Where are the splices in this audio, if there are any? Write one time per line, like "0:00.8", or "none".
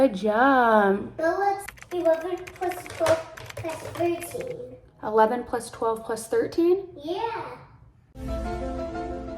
0:01.7